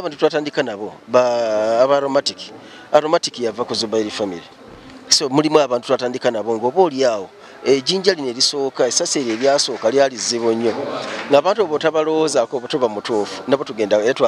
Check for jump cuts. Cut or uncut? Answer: uncut